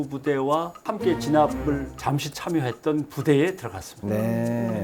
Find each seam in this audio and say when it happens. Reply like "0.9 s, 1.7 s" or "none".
none